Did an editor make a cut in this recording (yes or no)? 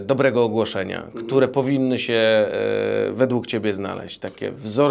no